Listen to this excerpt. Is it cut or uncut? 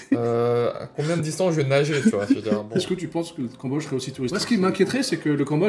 cut